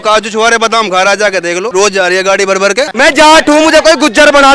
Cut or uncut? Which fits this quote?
cut